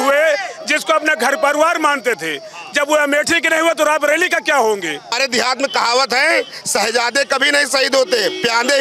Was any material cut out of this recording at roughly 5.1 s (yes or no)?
yes